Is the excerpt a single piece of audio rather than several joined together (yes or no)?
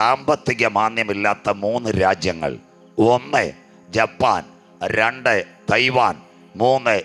yes